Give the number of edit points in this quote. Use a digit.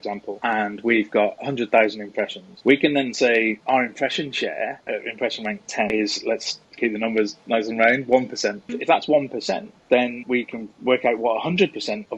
2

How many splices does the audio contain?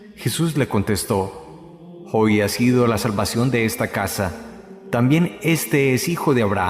1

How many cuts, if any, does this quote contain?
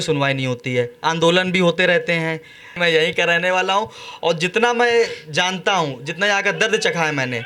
1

